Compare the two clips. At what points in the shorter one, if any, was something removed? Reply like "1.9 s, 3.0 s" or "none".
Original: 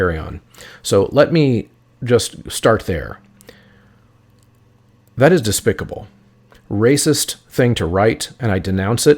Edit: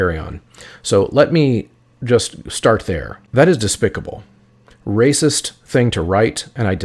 3.1 s